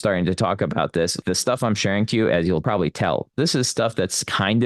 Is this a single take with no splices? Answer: no; 2 cuts; at 1.2 s, 2.6 s

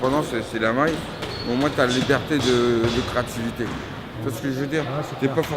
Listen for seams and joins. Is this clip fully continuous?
no; 1 cut; at 2.6 s

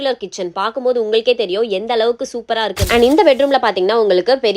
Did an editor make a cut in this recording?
yes; 1 cut; at 2.9 s

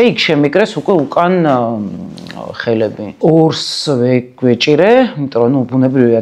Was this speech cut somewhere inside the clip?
yes; 1 cut; at 3.1 s

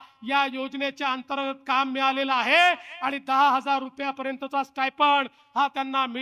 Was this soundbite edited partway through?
no; 0 cuts

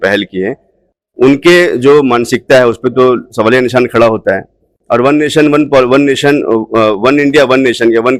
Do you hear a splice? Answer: no; 0 cuts

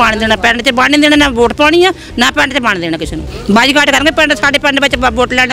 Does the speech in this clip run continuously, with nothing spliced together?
no; 1 cut; at 3.3 s

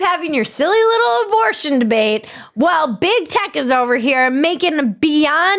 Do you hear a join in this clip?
no; 0 cuts

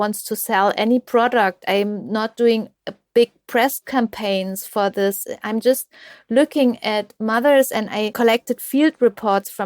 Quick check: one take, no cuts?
no; 1 cut; at 8.1 s

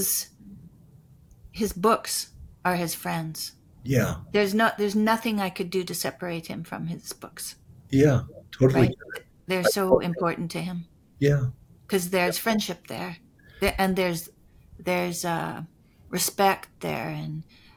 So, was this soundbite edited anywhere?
no; 0 cuts

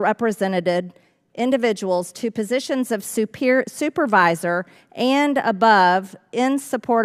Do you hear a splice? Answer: no; 0 cuts

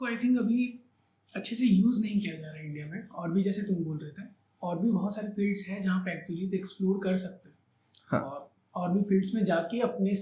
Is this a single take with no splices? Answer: yes; 0 cuts

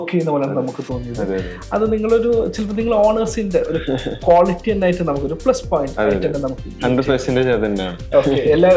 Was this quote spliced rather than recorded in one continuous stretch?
no; 0 cuts

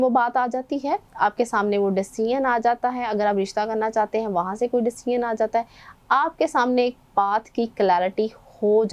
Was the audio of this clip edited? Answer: no; 0 cuts

